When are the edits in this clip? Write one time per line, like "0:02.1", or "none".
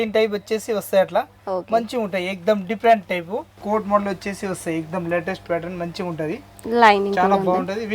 0:03.5